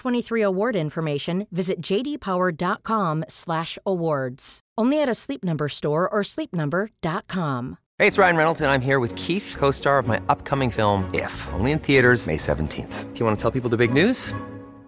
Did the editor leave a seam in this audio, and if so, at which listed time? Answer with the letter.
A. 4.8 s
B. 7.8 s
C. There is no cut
B